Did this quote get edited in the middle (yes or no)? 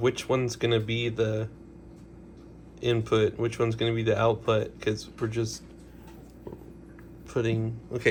no